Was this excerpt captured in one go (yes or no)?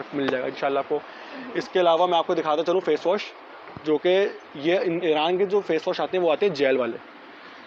yes